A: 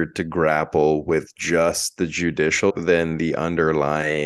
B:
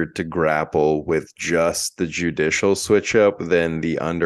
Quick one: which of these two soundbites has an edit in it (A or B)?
A